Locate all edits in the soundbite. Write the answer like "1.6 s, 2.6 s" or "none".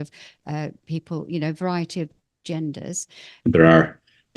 3.2 s